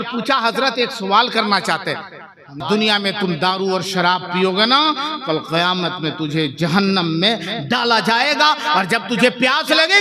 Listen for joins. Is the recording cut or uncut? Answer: cut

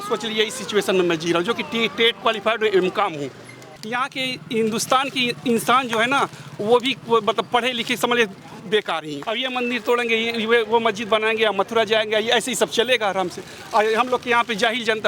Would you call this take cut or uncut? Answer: cut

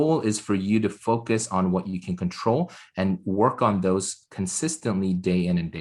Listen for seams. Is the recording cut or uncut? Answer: uncut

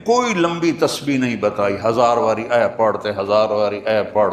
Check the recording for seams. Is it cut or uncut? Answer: uncut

